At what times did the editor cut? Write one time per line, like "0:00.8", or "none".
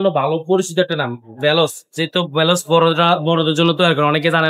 none